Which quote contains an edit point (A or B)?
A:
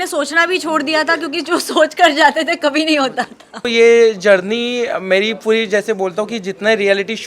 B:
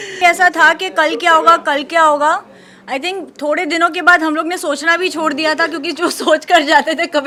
A